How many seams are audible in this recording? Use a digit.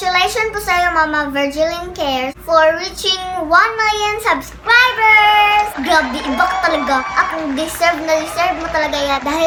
0